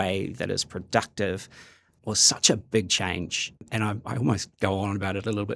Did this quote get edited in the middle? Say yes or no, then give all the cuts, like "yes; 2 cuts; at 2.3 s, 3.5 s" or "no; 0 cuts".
yes; 1 cut; at 1.9 s